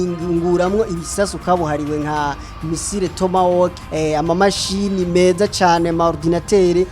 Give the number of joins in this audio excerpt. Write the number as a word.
one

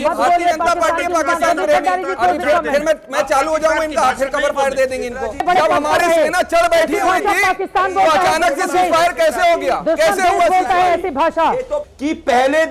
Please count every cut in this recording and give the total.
two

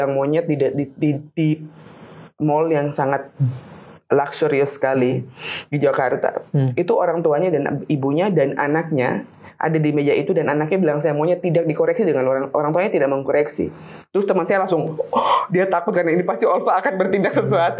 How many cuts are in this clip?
zero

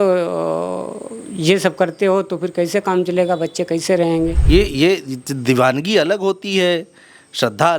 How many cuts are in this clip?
one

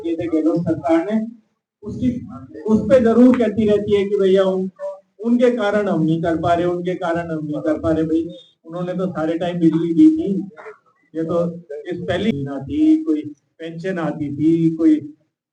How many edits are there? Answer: one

